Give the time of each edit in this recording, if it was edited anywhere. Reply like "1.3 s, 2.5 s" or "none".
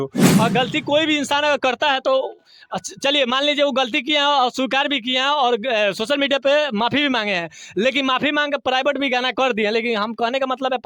none